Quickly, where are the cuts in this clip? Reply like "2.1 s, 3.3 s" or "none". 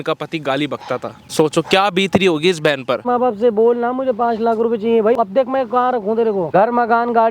1.2 s, 3.0 s, 5.2 s, 6.5 s